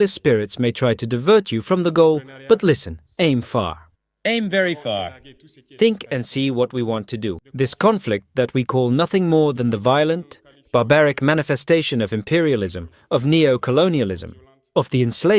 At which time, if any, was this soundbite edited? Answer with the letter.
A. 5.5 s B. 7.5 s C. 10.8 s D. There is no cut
B